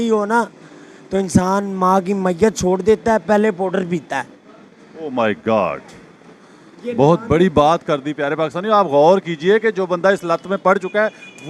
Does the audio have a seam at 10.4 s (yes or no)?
no